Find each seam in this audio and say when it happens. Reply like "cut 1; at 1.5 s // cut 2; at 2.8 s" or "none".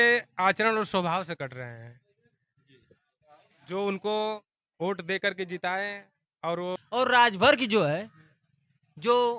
cut 1; at 6.7 s